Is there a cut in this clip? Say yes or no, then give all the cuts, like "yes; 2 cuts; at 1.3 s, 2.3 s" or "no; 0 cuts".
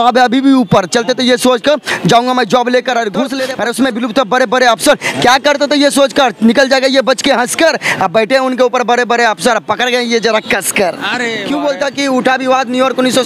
yes; 2 cuts; at 3.3 s, 11.4 s